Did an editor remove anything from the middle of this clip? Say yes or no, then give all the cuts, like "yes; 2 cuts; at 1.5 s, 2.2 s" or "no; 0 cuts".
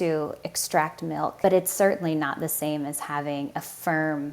yes; 1 cut; at 1.4 s